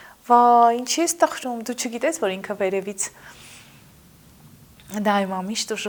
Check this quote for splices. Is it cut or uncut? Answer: uncut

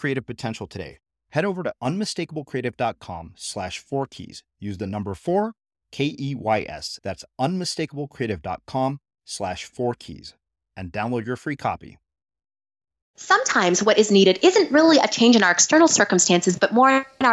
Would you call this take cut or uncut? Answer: cut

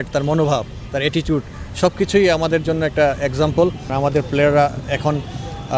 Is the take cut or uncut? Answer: cut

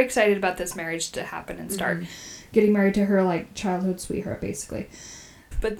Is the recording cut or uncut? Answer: uncut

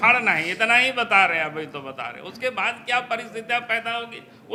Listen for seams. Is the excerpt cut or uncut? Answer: uncut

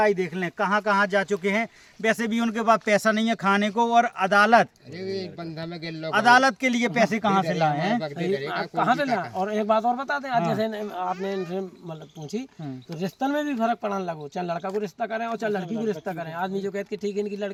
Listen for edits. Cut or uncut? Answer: uncut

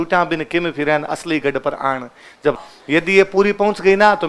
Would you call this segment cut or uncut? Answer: cut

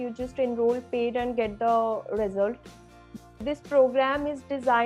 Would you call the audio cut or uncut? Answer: cut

